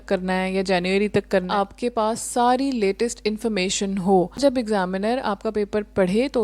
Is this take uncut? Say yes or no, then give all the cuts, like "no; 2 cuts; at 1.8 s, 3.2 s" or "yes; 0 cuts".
no; 2 cuts; at 1.5 s, 4.4 s